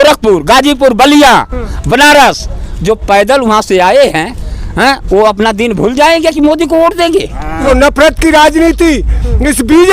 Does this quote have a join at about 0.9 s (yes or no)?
no